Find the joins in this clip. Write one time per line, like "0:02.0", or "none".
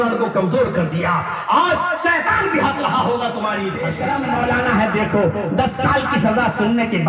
0:03.9

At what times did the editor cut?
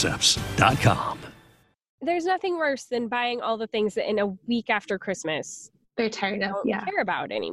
0:02.0

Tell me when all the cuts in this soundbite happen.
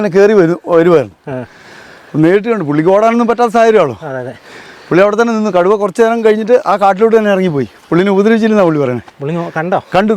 none

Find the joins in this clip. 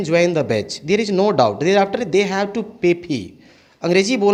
none

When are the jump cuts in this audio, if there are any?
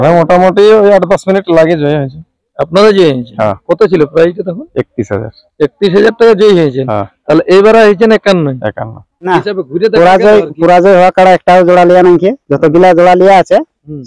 0:09.3

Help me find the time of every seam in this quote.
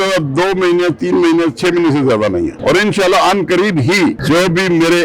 0:02.6
0:04.2

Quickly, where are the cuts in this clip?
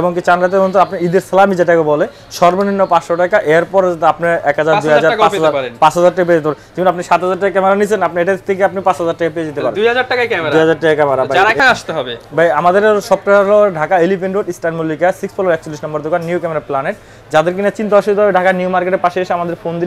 none

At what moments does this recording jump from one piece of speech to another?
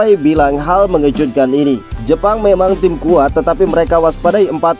0:01.9

